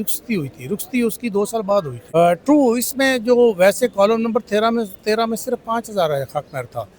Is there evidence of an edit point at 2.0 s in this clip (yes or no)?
yes